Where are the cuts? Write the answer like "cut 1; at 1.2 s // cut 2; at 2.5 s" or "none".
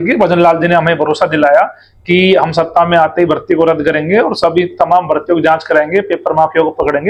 none